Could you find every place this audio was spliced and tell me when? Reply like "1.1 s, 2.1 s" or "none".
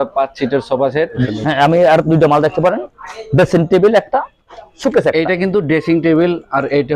1.2 s